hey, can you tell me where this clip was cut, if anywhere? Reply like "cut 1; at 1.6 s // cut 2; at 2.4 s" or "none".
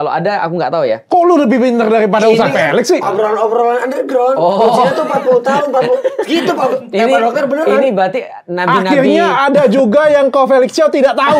none